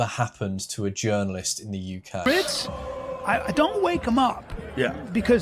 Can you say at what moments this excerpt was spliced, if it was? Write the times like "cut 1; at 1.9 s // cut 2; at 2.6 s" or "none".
cut 1; at 2.2 s